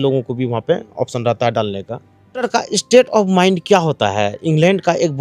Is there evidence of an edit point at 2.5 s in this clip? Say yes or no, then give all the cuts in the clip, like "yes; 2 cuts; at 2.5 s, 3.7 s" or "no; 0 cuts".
yes; 1 cut; at 2.5 s